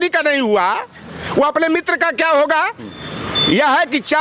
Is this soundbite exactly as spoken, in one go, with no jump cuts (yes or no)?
yes